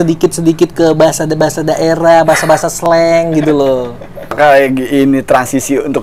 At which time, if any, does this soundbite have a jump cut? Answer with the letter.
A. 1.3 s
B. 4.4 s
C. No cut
B